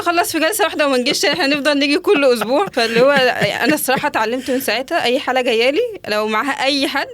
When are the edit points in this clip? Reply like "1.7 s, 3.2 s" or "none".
2.7 s